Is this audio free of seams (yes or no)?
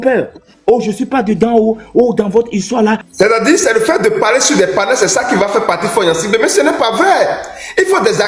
no